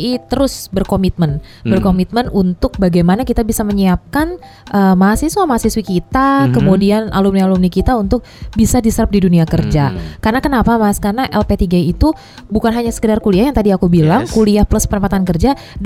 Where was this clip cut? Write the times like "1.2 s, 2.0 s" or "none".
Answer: none